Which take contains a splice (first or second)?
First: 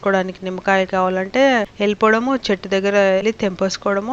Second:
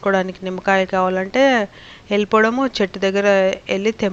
first